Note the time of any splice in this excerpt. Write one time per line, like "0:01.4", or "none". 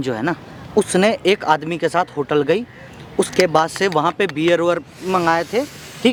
none